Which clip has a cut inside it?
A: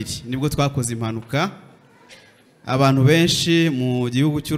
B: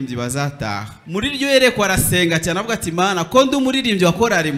B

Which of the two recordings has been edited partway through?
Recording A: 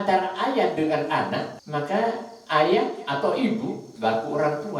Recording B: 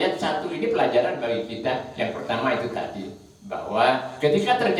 A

